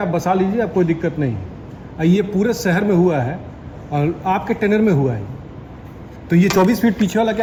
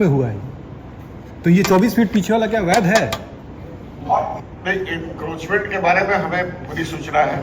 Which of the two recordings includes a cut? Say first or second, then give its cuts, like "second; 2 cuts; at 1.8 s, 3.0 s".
second; 1 cut; at 4.4 s